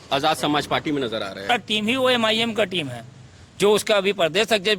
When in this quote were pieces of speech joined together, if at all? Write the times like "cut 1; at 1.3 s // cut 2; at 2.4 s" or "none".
cut 1; at 1.5 s